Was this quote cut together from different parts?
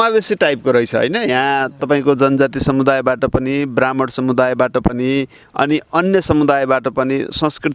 no; 0 cuts

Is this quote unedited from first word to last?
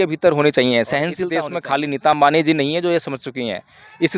no; 1 cut; at 1.2 s

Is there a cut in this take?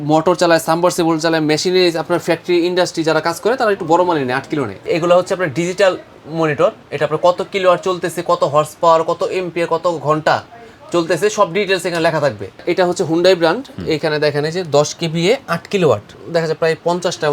yes; 3 cuts; at 4.8 s, 12.6 s, 16.2 s

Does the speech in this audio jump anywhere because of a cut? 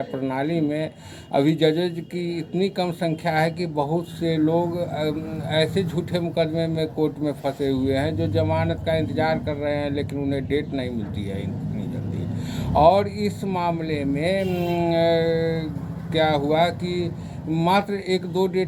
no; 0 cuts

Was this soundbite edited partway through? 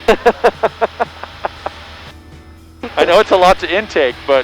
no; 0 cuts

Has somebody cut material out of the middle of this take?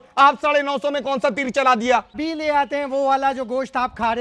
yes; 1 cut; at 2.2 s

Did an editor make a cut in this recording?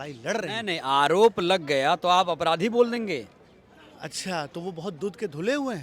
no; 0 cuts

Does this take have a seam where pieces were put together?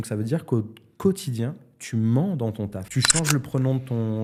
no; 0 cuts

